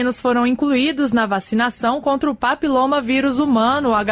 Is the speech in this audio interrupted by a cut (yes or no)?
no